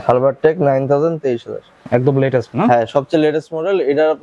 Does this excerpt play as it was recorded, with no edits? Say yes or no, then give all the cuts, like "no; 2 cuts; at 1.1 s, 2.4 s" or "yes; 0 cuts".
no; 1 cut; at 1.7 s